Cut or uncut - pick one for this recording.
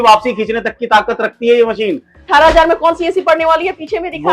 cut